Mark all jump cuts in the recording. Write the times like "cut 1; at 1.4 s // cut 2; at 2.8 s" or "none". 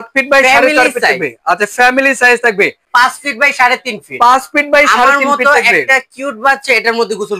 cut 1; at 2.8 s